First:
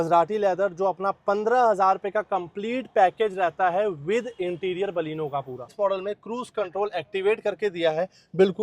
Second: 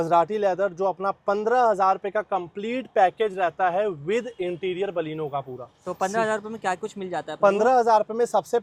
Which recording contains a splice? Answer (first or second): first